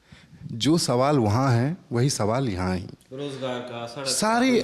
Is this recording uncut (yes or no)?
yes